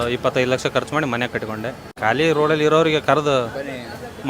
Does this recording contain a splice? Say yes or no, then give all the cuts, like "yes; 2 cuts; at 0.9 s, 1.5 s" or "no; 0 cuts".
yes; 1 cut; at 2.0 s